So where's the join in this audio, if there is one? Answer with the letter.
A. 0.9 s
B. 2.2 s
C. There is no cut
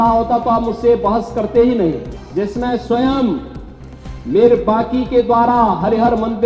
B